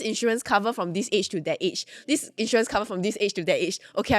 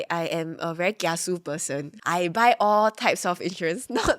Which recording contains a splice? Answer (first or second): second